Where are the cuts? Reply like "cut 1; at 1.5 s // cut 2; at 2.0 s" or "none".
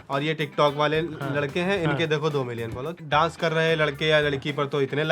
cut 1; at 3.0 s